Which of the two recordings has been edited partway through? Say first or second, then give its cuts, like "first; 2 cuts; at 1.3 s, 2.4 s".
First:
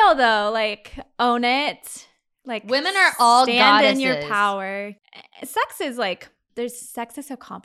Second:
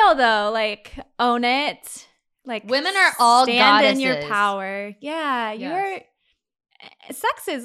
first; 2 cuts; at 4.9 s, 6.4 s